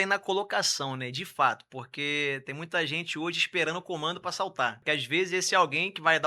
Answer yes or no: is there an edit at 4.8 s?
yes